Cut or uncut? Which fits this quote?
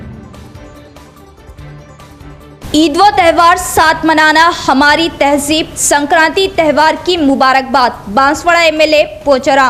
uncut